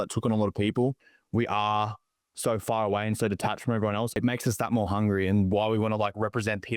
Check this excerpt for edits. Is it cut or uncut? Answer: cut